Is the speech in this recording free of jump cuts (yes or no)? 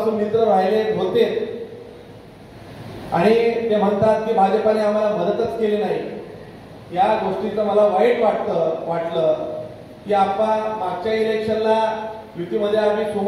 yes